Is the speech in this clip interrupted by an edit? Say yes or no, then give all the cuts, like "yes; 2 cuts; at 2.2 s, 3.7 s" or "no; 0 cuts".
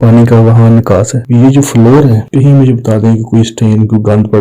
yes; 1 cut; at 1.2 s